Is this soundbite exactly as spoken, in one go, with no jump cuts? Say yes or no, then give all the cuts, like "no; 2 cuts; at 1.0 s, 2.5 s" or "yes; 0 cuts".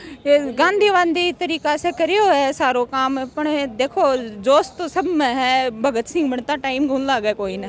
yes; 0 cuts